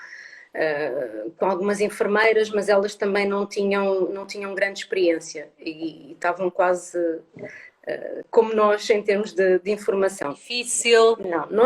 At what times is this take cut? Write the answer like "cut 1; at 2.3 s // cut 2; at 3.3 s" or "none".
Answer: cut 1; at 10.5 s